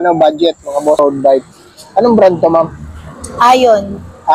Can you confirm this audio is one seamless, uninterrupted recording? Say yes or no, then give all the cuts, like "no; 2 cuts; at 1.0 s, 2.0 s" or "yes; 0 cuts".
no; 1 cut; at 1.0 s